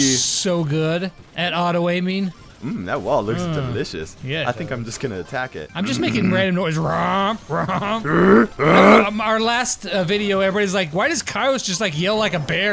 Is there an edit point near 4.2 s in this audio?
no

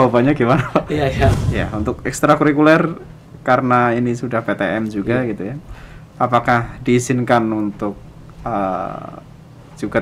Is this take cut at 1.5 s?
yes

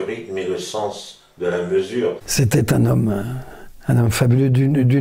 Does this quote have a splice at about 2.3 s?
yes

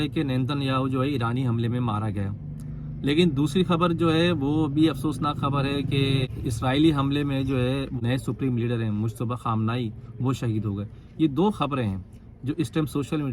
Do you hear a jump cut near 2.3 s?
no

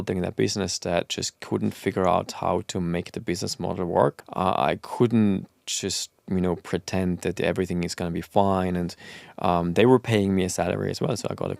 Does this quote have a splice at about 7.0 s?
no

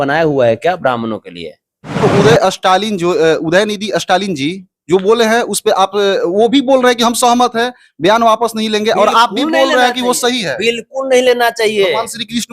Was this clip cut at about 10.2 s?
no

